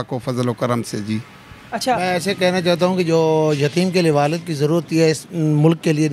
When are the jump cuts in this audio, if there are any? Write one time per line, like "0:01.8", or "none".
0:02.0